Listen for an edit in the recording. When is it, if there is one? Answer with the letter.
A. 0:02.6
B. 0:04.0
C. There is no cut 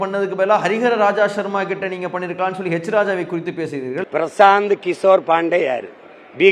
B